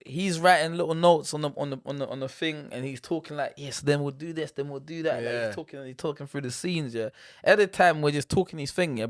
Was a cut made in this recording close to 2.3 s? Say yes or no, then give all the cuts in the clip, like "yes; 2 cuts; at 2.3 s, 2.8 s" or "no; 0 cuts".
no; 0 cuts